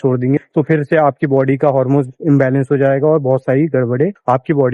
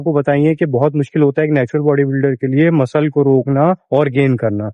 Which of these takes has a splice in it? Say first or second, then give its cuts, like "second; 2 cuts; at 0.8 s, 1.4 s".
first; 1 cut; at 2.1 s